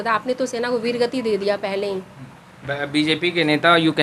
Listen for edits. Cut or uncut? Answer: uncut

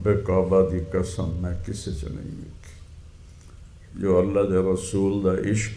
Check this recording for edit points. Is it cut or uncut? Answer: uncut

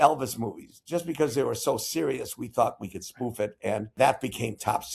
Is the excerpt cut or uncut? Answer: cut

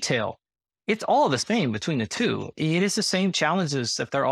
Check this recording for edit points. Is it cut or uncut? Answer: cut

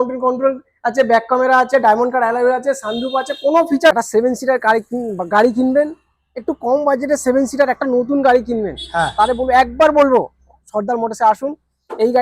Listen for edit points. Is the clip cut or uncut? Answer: cut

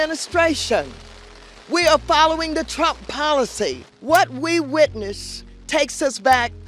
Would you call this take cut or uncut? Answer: cut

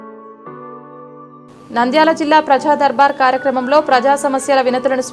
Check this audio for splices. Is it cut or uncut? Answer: cut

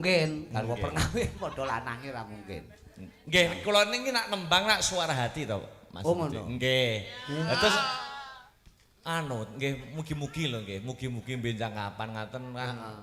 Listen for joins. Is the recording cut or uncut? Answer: uncut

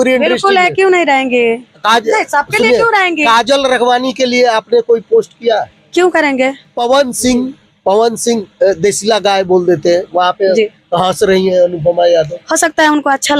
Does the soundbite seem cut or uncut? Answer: cut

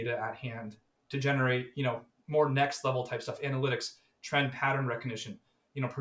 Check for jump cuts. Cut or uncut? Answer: uncut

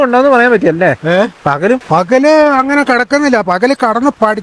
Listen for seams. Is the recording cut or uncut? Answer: cut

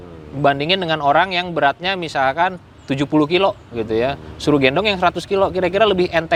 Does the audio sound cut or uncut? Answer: uncut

